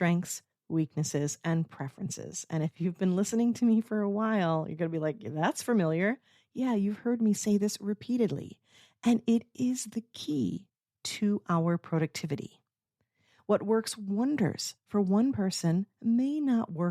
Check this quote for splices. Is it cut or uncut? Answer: uncut